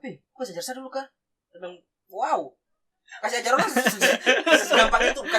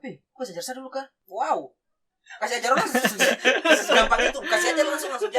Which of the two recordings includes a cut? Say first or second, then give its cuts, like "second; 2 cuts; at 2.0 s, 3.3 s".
second; 1 cut; at 1.2 s